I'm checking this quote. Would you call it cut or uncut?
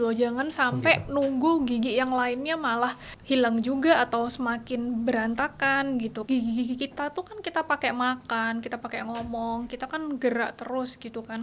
cut